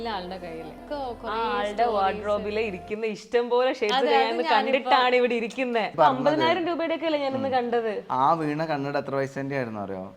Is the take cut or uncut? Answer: cut